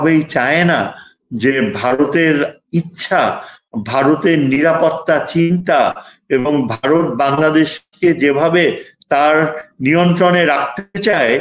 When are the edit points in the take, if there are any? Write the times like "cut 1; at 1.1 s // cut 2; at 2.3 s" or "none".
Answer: none